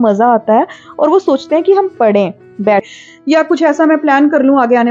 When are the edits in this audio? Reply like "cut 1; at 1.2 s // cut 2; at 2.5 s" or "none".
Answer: cut 1; at 2.9 s